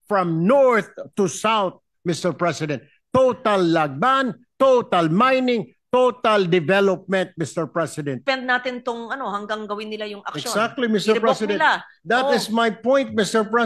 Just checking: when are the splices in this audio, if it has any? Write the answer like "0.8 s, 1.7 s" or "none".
8.2 s